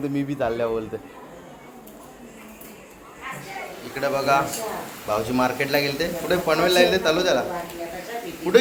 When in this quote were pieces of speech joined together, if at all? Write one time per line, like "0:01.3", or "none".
0:03.9